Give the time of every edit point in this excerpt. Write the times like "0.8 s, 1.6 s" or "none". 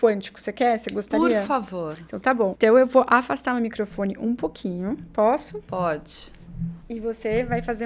2.5 s, 6.8 s